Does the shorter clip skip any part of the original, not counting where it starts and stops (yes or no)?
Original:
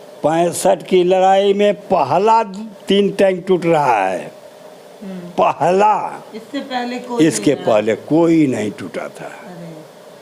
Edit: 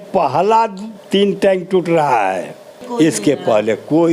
yes